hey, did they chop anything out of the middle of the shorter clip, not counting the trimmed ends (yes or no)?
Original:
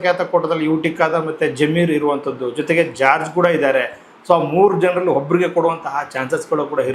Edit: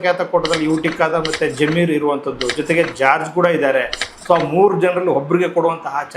no